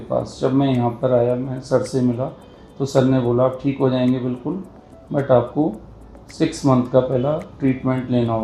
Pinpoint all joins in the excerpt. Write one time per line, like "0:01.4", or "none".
none